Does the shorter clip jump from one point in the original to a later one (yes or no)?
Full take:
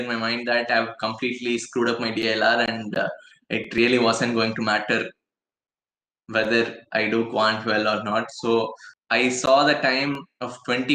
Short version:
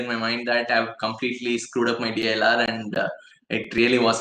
no